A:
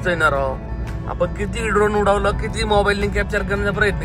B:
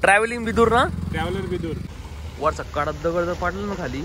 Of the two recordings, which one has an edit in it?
B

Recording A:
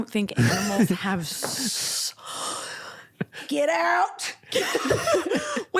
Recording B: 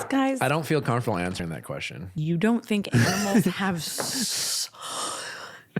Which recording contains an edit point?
B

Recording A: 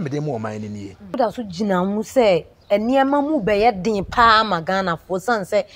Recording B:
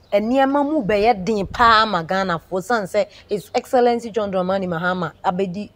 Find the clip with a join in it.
A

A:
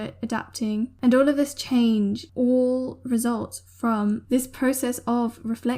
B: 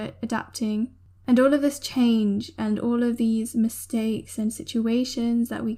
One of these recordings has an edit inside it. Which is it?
A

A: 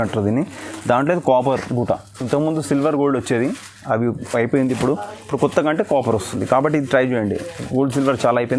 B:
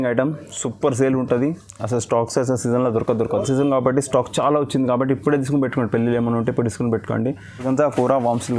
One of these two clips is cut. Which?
B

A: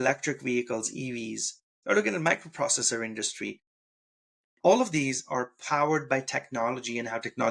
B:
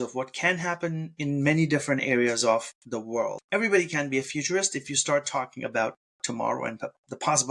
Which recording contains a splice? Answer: B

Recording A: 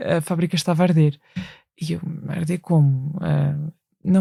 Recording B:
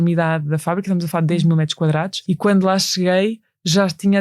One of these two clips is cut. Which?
B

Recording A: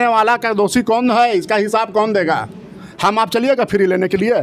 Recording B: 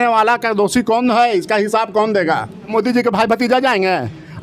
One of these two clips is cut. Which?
B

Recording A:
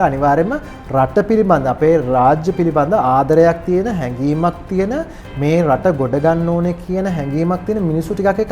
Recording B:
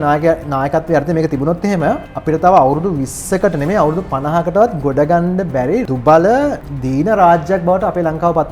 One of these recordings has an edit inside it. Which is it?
B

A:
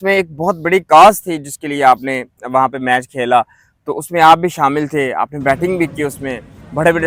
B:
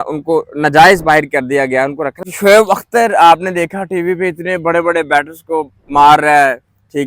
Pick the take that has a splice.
B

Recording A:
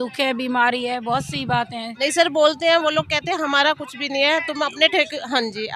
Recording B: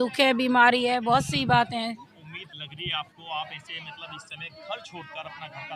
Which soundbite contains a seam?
A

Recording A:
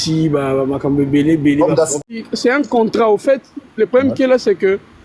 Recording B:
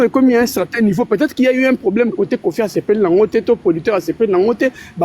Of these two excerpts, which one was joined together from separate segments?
A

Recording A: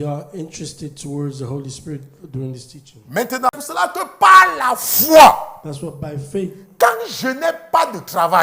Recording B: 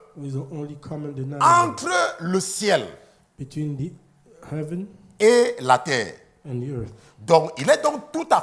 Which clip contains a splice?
A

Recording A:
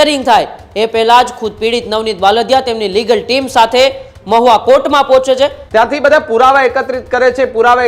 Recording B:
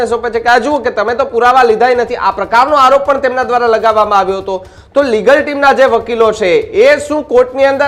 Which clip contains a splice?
A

